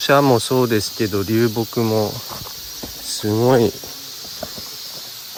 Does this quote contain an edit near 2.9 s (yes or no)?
no